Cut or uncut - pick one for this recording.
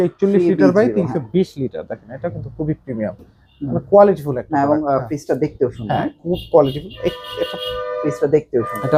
uncut